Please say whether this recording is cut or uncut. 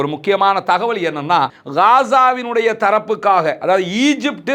cut